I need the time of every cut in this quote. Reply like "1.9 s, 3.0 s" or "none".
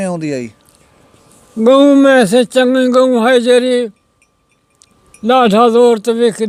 none